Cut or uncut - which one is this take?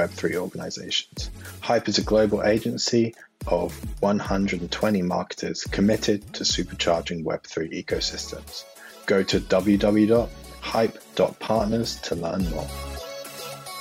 cut